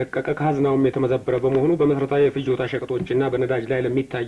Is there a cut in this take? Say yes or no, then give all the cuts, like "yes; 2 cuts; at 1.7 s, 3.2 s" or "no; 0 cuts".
no; 0 cuts